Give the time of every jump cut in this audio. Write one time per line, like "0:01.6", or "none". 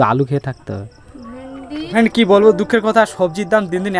0:02.0